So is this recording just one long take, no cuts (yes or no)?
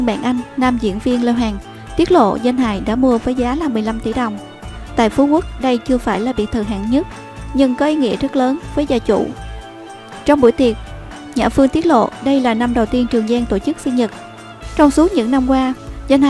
yes